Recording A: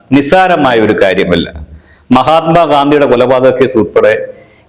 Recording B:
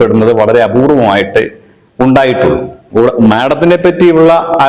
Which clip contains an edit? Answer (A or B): B